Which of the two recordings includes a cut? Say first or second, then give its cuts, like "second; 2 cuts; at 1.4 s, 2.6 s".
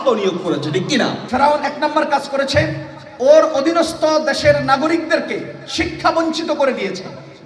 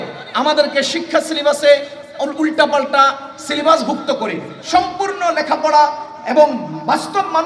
first; 1 cut; at 1.2 s